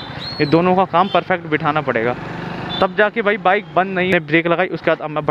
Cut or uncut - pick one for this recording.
cut